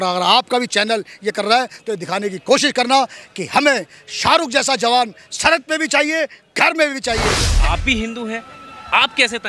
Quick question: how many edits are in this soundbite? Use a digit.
1